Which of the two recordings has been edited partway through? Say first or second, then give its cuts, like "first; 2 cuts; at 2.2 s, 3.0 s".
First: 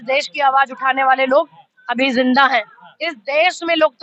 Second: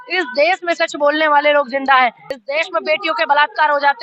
second; 1 cut; at 2.3 s